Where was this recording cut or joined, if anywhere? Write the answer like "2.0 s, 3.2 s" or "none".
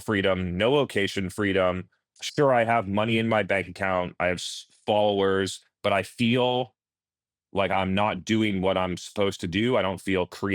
3.5 s, 7.7 s